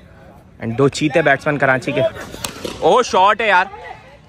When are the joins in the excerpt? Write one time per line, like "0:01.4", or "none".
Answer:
0:02.1